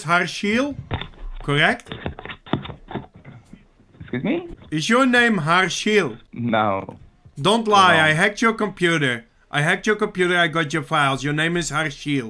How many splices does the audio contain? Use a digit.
3